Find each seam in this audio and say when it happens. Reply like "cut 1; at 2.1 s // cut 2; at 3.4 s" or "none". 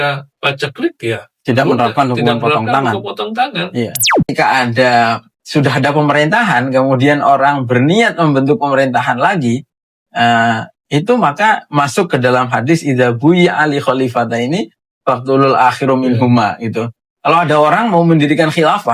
cut 1; at 4.3 s